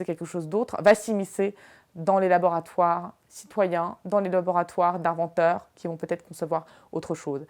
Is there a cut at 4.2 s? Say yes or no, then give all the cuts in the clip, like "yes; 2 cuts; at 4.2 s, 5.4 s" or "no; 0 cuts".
no; 0 cuts